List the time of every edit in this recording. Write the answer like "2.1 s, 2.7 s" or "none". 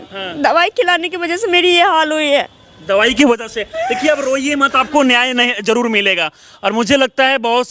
none